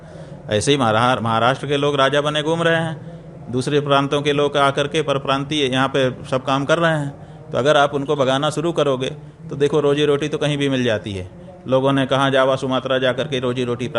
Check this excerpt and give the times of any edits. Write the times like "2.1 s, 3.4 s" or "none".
none